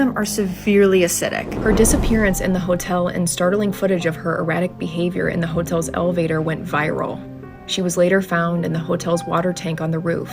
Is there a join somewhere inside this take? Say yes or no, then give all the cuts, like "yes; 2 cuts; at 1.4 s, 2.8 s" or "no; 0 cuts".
yes; 1 cut; at 1.5 s